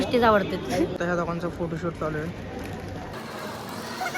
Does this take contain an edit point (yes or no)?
no